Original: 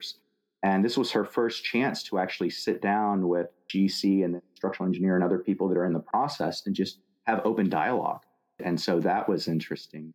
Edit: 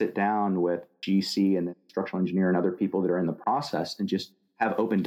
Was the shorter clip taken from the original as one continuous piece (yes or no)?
yes